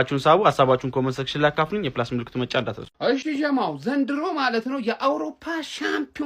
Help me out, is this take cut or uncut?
cut